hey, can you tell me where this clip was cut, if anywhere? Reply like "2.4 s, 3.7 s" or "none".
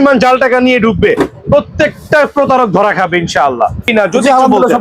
3.8 s